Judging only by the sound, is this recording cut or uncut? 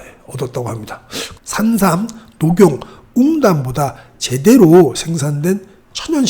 cut